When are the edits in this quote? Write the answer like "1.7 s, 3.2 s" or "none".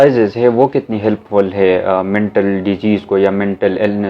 none